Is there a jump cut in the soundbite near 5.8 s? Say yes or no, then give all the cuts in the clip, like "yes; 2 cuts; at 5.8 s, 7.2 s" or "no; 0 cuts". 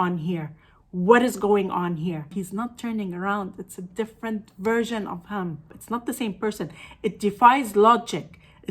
yes; 2 cuts; at 2.3 s, 5.8 s